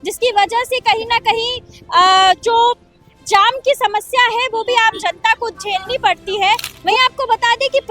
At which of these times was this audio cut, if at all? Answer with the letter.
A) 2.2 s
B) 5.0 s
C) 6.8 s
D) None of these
C